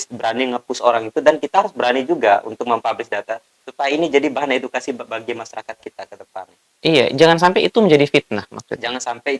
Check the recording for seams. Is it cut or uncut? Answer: uncut